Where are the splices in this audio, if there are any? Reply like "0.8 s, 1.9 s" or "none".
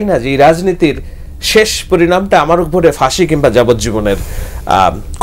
none